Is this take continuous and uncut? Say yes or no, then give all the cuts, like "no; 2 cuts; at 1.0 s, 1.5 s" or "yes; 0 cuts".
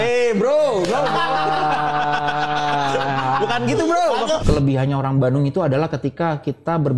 no; 1 cut; at 4.4 s